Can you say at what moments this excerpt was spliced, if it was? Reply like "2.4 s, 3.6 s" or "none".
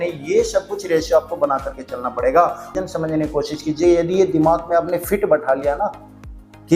2.7 s